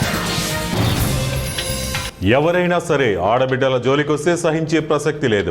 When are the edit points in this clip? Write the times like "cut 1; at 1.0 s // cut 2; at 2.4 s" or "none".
cut 1; at 2.1 s